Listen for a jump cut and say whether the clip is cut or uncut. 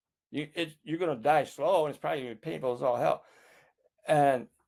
uncut